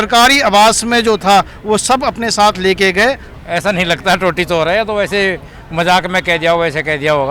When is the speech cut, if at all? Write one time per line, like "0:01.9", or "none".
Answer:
0:03.3